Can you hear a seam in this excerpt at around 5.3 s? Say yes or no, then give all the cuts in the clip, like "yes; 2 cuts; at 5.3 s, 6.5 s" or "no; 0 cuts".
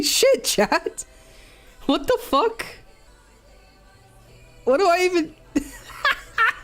no; 1 cut; at 3.1 s